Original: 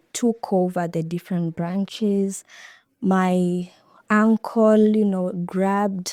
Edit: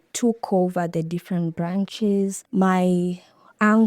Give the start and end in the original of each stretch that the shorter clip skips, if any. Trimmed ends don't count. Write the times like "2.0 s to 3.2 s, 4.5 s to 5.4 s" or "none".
2.4 s to 2.9 s